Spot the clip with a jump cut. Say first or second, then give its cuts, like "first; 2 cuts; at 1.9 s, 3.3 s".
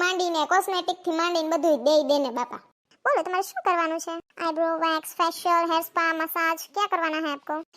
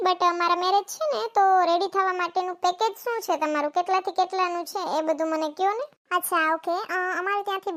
first; 1 cut; at 2.9 s